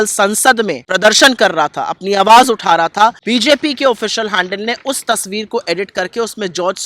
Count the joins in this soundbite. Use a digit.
2